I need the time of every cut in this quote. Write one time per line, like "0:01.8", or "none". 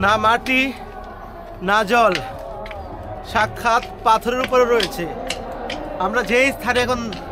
none

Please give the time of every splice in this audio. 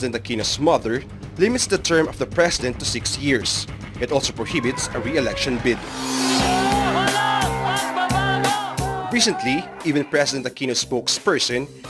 none

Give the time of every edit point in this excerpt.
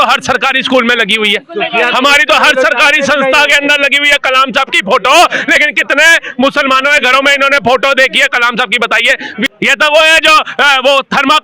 0:09.5

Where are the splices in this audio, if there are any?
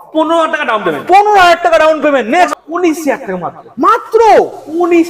0:02.5

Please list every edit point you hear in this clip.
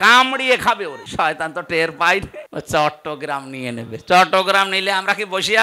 0:01.0
0:02.4

